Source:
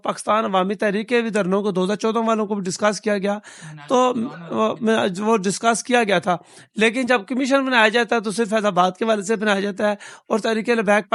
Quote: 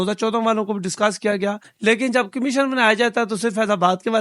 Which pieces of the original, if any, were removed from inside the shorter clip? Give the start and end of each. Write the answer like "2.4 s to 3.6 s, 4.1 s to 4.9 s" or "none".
3.5 s to 6.6 s